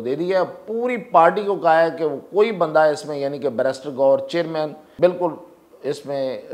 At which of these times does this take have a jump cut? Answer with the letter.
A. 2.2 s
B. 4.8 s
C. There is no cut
B